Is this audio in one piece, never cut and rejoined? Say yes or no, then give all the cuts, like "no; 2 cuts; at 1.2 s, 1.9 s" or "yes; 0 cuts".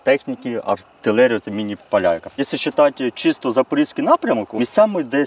no; 3 cuts; at 0.9 s, 1.8 s, 2.4 s